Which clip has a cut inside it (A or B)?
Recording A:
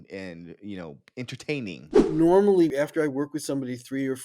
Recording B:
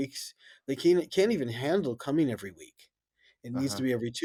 A